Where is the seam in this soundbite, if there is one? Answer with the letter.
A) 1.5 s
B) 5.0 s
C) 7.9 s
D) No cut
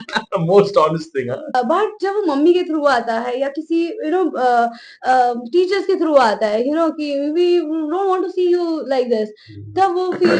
A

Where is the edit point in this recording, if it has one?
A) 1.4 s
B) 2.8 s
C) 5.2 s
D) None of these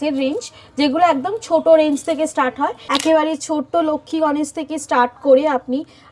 B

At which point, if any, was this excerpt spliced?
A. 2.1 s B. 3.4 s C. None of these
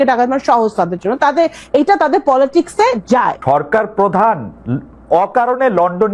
B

